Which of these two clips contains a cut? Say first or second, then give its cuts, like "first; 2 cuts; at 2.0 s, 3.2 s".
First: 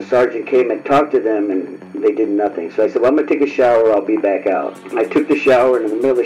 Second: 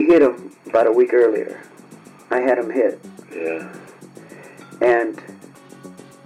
first; 1 cut; at 4.8 s